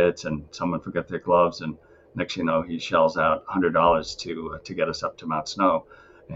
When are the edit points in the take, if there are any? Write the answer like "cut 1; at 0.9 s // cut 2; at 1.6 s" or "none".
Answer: none